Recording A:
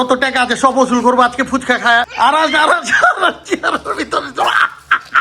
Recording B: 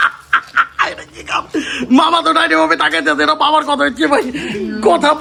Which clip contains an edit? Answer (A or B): A